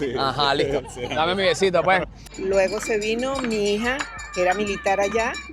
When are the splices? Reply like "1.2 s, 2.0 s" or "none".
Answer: 2.2 s